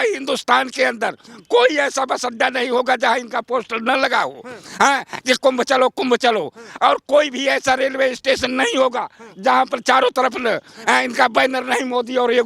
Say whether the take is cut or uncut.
uncut